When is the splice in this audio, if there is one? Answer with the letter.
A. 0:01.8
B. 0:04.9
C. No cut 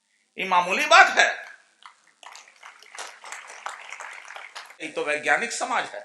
B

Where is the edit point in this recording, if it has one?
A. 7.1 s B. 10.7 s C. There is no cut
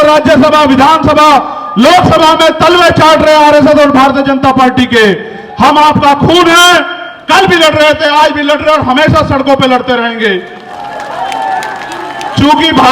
C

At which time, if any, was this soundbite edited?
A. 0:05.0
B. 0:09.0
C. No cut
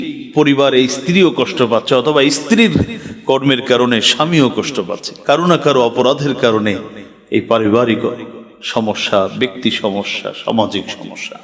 A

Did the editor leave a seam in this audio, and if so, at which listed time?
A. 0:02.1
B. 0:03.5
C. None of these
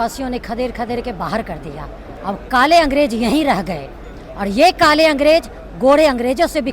A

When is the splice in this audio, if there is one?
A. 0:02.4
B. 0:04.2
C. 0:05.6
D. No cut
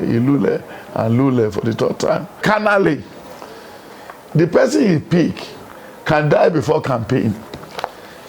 A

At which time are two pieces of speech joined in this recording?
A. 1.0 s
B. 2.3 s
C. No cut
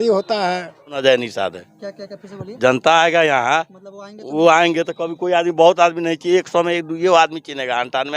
A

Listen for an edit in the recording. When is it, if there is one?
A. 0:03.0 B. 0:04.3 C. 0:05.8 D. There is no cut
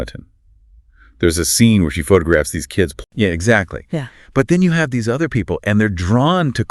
A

